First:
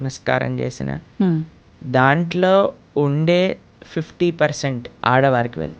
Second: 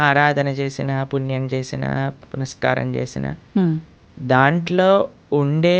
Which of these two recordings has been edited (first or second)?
first